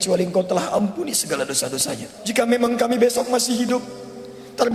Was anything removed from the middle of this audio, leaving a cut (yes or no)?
yes